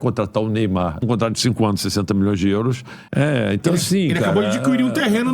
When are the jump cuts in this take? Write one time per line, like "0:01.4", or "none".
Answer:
0:01.0
0:02.9